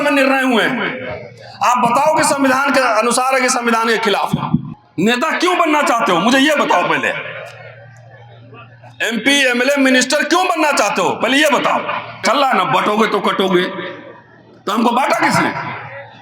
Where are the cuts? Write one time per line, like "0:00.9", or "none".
0:04.8
0:12.2